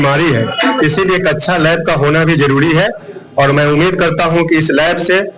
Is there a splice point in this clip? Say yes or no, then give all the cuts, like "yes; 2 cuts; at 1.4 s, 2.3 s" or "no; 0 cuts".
no; 0 cuts